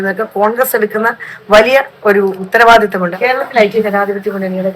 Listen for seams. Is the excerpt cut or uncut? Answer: cut